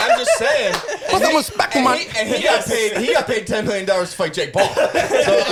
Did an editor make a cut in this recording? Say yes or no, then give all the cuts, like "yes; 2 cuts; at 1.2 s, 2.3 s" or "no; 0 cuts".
no; 0 cuts